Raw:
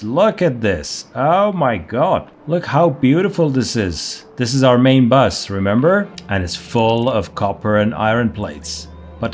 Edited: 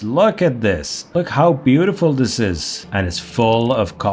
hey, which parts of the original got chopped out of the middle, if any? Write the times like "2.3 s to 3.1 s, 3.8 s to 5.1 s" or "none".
1.0 s to 2.3 s, 4.2 s to 6.2 s